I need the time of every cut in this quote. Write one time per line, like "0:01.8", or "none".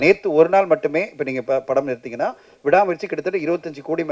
none